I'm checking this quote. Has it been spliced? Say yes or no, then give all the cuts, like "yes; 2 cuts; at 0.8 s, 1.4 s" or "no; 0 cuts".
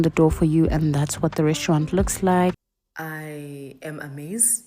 yes; 1 cut; at 2.6 s